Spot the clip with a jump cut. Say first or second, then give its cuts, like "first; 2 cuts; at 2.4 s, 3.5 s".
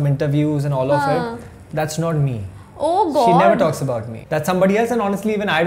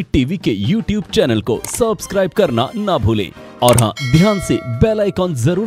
first; 1 cut; at 4.1 s